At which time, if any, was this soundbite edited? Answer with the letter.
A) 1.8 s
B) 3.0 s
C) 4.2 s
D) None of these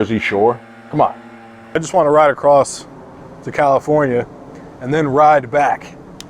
A